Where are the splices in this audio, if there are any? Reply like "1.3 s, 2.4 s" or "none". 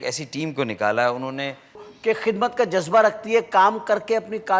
1.9 s